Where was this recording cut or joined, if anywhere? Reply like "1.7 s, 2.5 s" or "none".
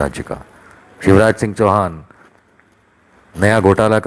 none